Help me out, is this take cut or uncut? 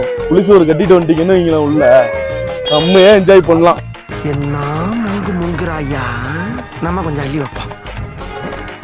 cut